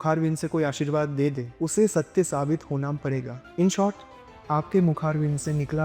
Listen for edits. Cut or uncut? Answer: cut